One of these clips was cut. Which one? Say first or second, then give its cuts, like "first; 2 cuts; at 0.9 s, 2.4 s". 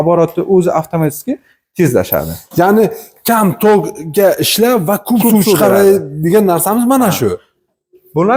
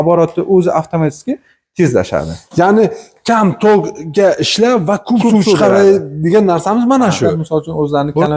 second; 1 cut; at 7.3 s